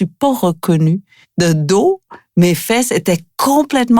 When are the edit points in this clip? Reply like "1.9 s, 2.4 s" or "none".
1.2 s